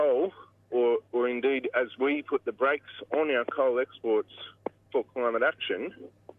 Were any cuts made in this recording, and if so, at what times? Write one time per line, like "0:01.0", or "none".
none